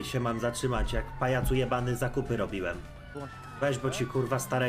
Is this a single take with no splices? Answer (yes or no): no